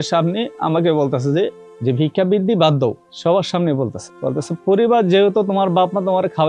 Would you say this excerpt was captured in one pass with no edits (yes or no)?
no